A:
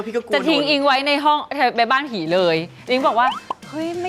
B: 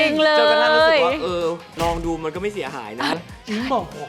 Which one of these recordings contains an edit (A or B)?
B